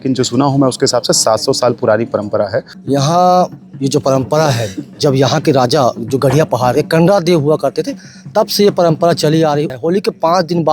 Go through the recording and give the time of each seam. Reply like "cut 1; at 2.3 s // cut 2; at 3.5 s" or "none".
cut 1; at 2.7 s // cut 2; at 9.7 s